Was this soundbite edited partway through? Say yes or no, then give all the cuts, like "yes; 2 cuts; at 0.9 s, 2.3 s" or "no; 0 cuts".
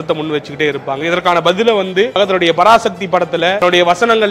yes; 2 cuts; at 2.2 s, 3.6 s